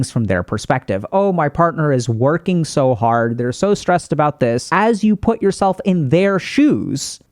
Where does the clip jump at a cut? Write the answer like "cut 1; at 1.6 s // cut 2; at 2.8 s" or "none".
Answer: cut 1; at 4.7 s